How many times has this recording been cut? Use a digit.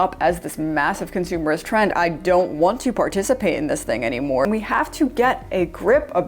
2